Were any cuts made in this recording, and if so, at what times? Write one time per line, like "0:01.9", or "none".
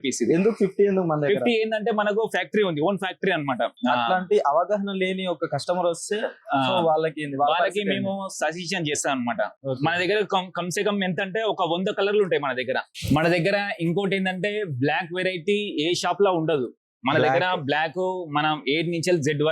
0:03.7
0:09.5
0:12.9